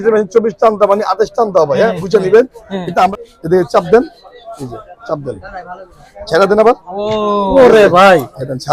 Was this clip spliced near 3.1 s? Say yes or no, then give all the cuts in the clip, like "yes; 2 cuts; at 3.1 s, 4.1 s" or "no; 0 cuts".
yes; 1 cut; at 3.1 s